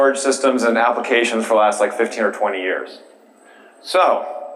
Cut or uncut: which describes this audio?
uncut